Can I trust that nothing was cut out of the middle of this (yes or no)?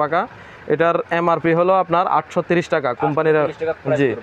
yes